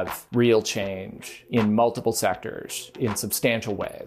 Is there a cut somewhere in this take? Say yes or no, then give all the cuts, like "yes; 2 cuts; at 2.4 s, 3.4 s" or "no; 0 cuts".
yes; 1 cut; at 2.9 s